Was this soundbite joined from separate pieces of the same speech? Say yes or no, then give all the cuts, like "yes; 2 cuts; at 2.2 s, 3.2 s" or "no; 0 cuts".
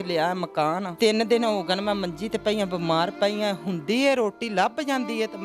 yes; 1 cut; at 0.9 s